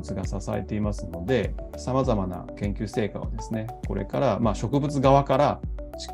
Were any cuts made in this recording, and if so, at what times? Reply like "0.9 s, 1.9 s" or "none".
1.6 s, 2.5 s